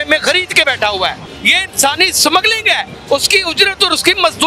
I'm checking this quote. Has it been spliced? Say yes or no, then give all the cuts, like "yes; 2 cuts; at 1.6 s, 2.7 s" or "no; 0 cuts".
yes; 2 cuts; at 1.3 s, 2.9 s